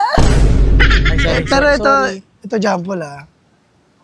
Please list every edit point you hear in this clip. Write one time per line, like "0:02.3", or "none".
none